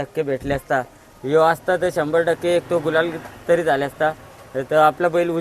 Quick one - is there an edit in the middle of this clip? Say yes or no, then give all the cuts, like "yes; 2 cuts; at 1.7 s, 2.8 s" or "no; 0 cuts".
no; 0 cuts